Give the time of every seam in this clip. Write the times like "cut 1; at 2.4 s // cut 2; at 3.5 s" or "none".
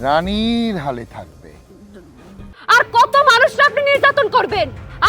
cut 1; at 2.5 s